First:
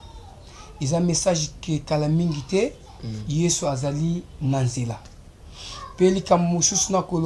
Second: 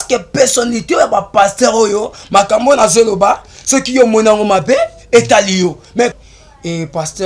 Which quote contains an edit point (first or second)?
second